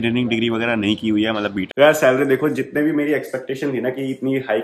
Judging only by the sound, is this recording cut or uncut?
cut